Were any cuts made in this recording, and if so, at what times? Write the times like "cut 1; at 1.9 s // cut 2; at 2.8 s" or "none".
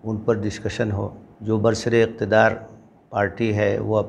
cut 1; at 1.2 s